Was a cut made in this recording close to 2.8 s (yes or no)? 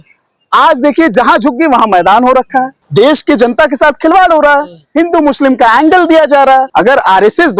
yes